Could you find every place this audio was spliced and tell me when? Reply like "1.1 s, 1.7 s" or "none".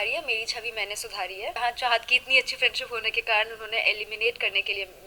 1.6 s